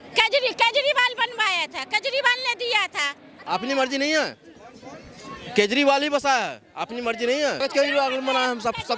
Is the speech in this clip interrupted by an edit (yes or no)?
yes